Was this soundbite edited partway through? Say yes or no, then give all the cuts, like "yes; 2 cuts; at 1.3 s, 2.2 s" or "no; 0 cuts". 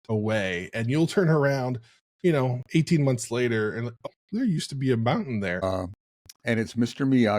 yes; 2 cuts; at 4.0 s, 5.6 s